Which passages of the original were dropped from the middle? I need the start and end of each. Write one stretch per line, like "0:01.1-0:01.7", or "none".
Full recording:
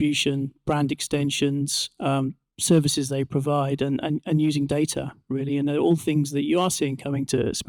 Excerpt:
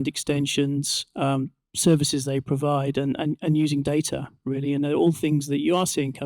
none